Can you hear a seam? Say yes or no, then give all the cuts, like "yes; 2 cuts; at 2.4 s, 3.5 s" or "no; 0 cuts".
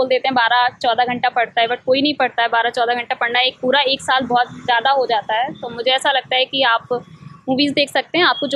no; 0 cuts